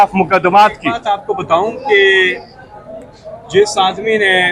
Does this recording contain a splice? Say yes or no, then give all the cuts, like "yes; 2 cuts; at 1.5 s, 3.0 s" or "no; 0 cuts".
yes; 1 cut; at 1.0 s